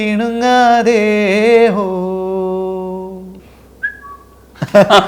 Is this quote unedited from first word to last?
yes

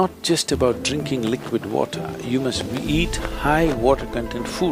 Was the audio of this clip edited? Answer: no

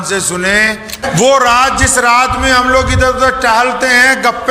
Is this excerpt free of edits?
no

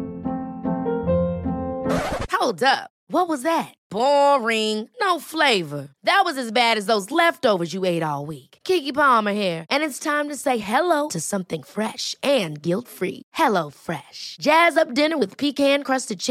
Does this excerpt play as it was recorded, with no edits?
yes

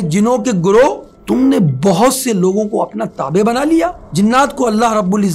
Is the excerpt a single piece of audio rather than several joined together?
no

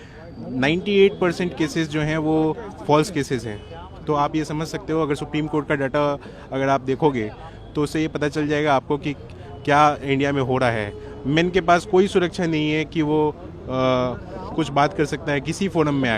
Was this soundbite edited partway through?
no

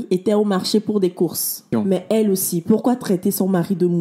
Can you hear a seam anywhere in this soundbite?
yes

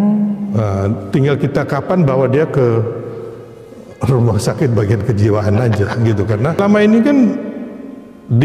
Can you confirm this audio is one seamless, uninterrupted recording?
no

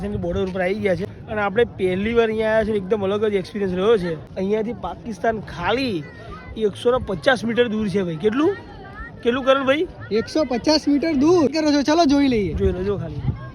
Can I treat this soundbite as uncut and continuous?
no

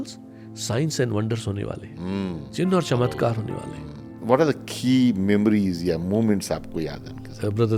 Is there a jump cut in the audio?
yes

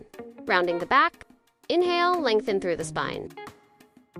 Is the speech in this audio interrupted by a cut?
no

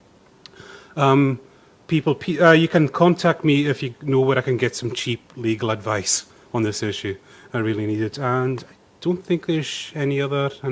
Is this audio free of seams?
yes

